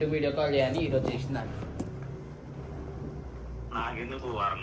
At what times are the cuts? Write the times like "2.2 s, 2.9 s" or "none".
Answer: none